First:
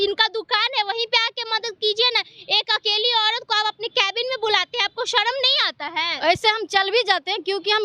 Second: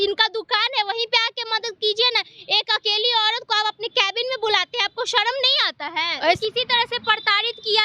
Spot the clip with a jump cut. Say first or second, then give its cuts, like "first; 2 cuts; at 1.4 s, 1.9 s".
second; 1 cut; at 6.4 s